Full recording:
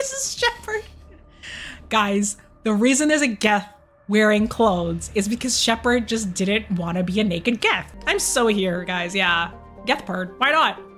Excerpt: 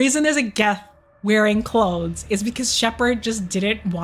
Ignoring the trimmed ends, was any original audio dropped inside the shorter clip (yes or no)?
no